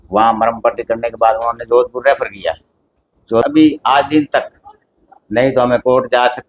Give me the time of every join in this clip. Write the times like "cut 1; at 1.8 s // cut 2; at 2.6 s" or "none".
cut 1; at 3.5 s